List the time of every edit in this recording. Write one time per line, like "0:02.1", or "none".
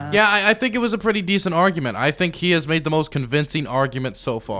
none